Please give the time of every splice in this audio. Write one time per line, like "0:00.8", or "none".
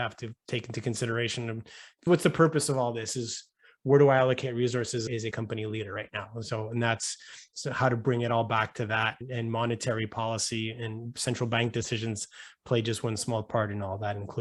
none

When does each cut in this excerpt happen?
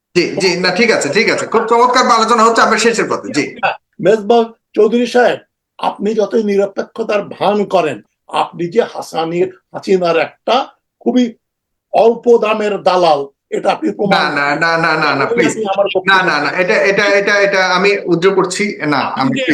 0:03.9

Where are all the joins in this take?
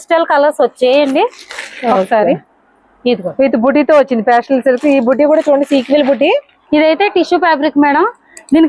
0:06.6

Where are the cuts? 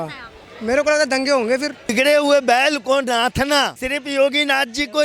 0:01.9
0:03.8

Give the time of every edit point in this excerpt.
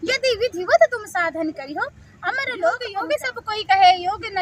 0:03.0

